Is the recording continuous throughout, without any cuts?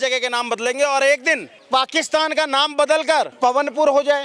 no; 2 cuts; at 1.6 s, 3.3 s

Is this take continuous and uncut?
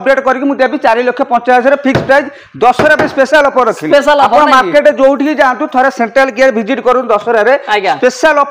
yes; 0 cuts

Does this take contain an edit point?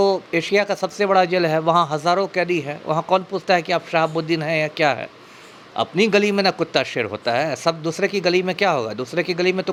no; 0 cuts

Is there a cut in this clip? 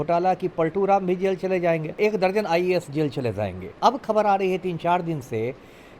yes; 2 cuts; at 2.0 s, 3.7 s

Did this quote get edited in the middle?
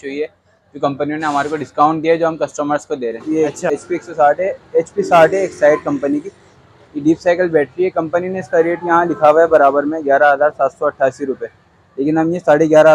yes; 1 cut; at 3.2 s

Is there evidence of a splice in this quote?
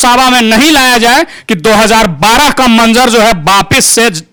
no; 0 cuts

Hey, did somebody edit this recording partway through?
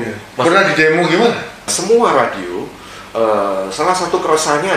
yes; 1 cut; at 1.7 s

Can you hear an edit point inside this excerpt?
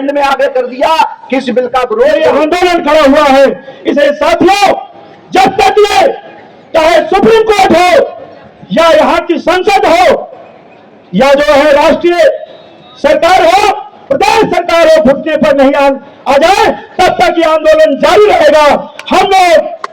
yes; 1 cut; at 2.3 s

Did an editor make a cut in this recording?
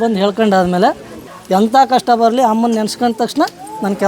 yes; 1 cut; at 1.1 s

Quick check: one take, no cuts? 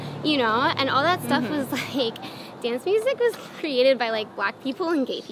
yes; 0 cuts

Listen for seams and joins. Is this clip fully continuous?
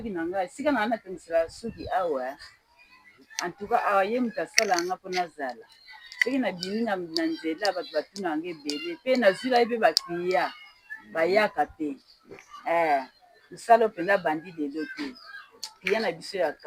yes; 0 cuts

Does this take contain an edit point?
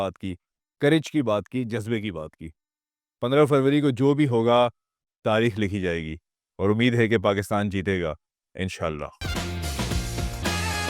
yes; 1 cut; at 9.2 s

